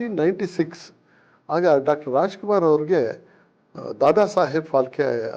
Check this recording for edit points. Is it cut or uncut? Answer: uncut